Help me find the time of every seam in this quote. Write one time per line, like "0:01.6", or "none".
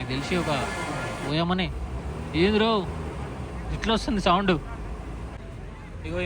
0:05.2